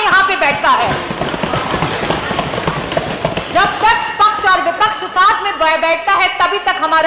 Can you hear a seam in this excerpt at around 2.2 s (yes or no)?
no